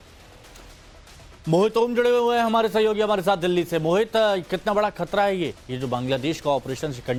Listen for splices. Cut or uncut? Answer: uncut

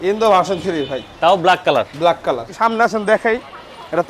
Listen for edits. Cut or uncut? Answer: cut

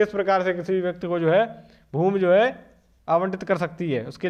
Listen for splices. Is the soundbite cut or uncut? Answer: uncut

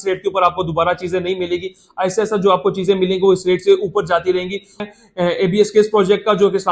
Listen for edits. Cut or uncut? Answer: cut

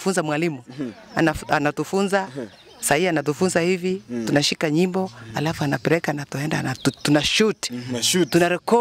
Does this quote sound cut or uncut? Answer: uncut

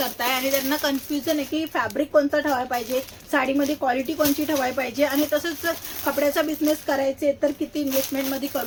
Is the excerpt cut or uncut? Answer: uncut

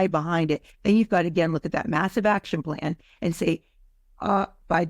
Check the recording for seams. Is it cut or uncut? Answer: uncut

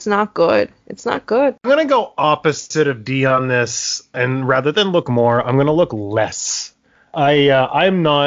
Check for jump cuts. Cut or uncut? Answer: cut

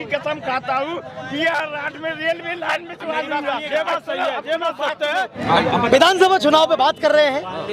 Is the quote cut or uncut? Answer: cut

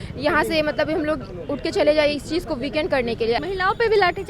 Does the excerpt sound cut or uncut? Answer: cut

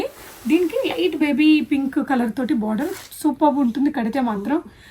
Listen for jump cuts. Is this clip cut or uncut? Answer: uncut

